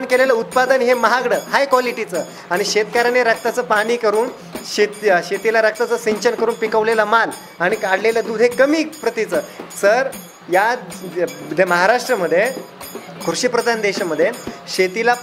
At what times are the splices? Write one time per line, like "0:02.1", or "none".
none